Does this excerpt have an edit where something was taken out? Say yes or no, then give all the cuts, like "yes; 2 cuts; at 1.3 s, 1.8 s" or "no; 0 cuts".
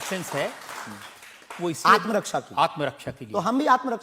no; 0 cuts